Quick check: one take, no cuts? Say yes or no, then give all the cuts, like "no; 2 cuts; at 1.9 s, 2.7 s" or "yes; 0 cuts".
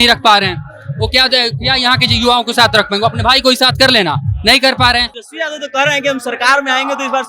no; 1 cut; at 5.2 s